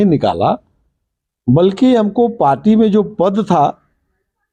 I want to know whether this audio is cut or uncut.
uncut